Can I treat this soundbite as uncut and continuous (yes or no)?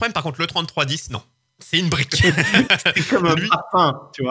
yes